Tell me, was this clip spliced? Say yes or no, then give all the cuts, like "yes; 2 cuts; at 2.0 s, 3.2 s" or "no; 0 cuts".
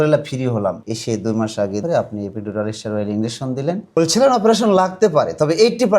yes; 3 cuts; at 0.9 s, 1.8 s, 3.9 s